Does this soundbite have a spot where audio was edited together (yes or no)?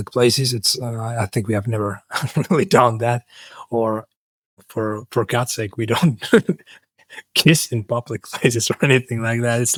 no